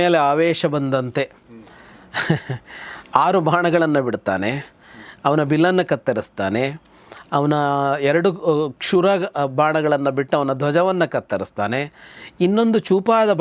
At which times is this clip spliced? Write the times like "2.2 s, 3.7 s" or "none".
none